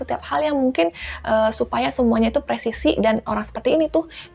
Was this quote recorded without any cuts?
yes; 0 cuts

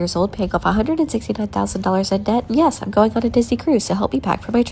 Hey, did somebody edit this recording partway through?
no; 0 cuts

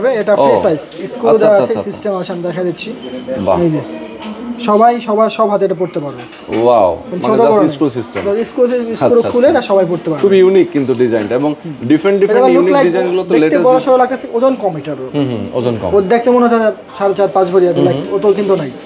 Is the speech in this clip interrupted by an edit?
no; 0 cuts

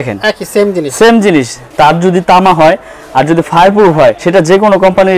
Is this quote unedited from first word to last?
no; 2 cuts; at 1.6 s, 4.2 s

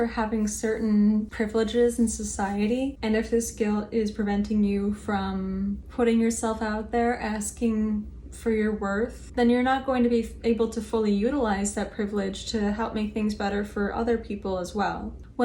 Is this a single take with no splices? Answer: no; 1 cut; at 1.3 s

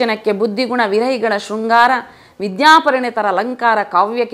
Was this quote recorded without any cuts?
yes; 0 cuts

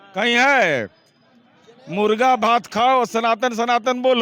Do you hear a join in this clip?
no; 0 cuts

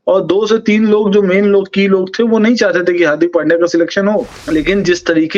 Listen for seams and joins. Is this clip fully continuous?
no; 1 cut; at 4.4 s

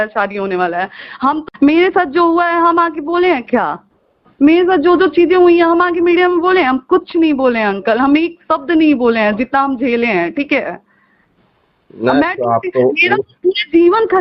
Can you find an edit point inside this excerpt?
yes; 1 cut; at 1.5 s

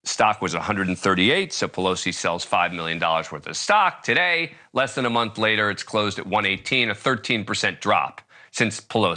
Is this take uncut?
yes; 0 cuts

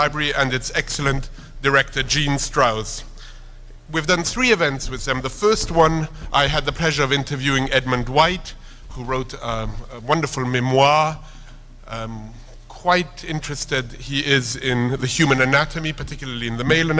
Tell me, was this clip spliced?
no; 0 cuts

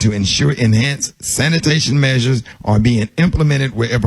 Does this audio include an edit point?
yes; 1 cut; at 2.5 s

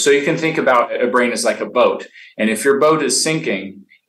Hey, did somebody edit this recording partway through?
yes; 1 cut; at 0.9 s

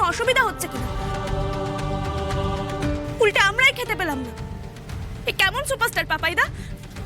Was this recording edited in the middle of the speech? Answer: no; 0 cuts

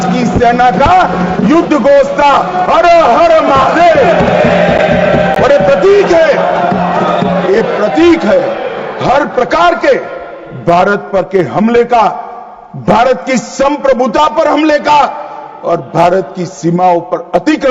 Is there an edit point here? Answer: no; 0 cuts

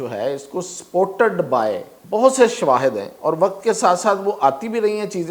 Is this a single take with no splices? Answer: no; 1 cut; at 1.9 s

